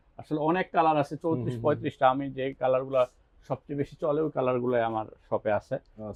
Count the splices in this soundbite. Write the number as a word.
zero